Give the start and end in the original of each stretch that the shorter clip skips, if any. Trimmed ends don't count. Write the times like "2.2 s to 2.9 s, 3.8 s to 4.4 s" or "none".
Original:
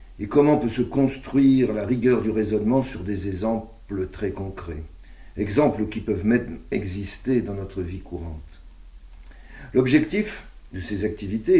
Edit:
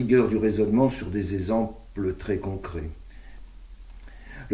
5.2 s to 8.5 s